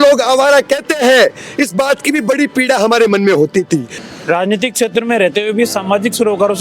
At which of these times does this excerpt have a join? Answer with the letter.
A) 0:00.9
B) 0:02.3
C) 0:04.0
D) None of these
C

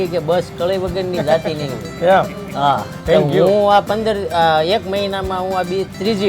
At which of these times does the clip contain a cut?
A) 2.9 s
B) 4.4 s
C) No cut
A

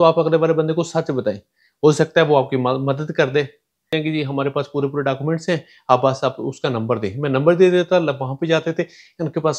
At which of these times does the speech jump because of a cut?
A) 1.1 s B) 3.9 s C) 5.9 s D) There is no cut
B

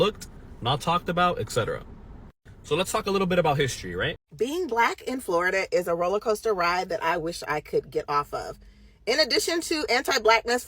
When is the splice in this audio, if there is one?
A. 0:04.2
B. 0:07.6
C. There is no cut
A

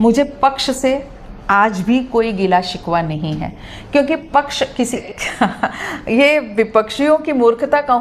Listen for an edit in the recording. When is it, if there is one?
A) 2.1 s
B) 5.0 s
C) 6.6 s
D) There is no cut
B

